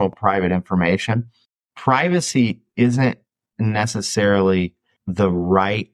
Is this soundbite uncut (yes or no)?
no